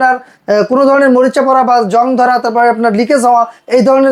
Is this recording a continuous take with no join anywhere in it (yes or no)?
yes